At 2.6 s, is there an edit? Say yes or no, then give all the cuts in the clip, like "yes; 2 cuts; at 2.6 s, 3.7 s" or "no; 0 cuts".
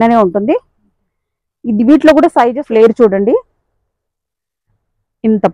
yes; 1 cut; at 2.6 s